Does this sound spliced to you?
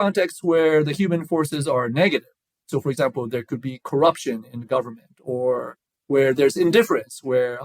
no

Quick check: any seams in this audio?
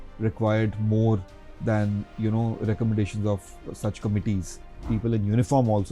yes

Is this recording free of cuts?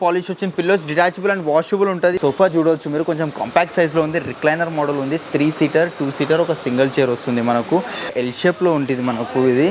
no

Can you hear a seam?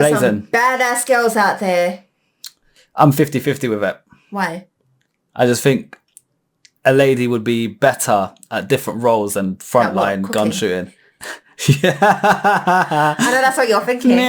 no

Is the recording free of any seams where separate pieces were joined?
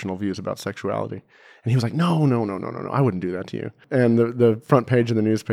no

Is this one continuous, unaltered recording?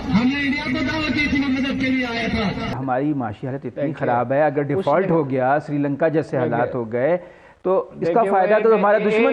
no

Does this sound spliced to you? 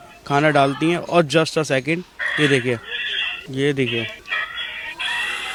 no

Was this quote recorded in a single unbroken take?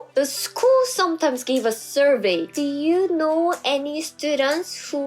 yes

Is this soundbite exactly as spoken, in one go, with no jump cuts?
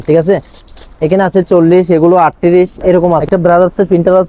no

